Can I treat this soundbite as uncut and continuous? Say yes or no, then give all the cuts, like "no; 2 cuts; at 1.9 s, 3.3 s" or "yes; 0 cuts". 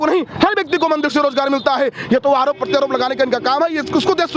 yes; 0 cuts